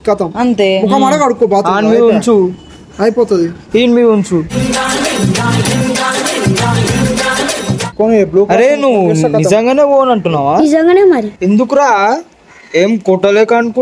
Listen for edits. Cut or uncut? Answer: cut